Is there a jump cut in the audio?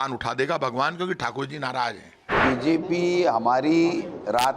yes; 1 cut; at 2.4 s

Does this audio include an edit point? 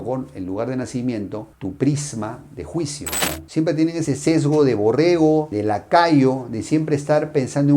yes; 1 cut; at 3.3 s

